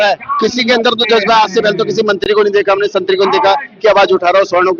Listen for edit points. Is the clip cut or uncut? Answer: uncut